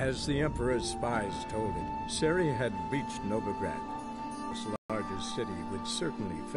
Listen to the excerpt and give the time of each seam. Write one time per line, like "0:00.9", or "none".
0:04.7